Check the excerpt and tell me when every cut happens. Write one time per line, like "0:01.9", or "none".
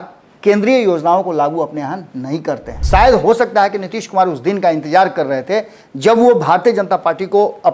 0:02.7